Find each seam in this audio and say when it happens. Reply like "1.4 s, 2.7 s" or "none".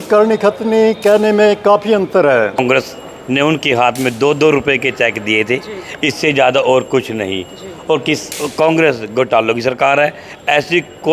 2.6 s